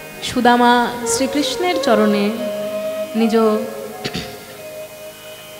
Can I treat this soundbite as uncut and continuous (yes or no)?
yes